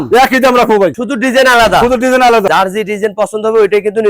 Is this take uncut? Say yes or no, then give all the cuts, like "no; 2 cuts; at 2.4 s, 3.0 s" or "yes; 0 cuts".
no; 2 cuts; at 1.0 s, 2.5 s